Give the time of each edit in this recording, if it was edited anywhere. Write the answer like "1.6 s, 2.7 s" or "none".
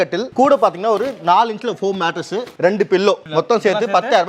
2.5 s, 3.2 s